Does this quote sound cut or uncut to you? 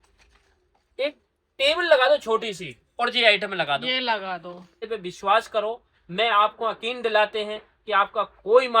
cut